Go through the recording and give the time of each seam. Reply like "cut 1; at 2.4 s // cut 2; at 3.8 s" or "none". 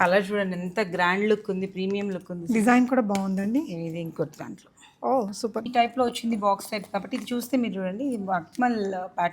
cut 1; at 5.6 s